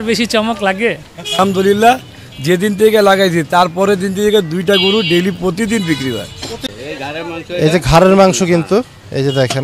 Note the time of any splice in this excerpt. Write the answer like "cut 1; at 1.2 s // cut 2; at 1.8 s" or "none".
cut 1; at 1.4 s // cut 2; at 6.7 s